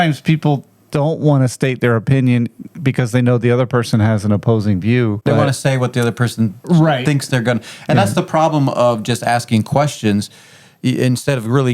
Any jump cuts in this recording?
yes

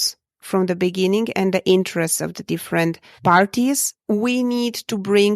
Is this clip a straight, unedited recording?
no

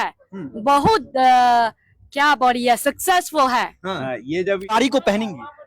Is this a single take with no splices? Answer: no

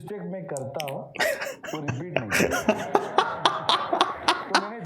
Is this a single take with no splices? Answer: yes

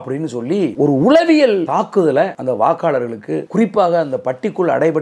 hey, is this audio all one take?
no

